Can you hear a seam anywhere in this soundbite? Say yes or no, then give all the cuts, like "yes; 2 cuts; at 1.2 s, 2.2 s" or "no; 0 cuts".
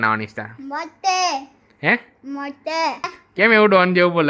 yes; 1 cut; at 3.1 s